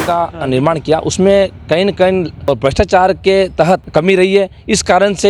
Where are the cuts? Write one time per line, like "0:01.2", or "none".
0:02.3
0:03.8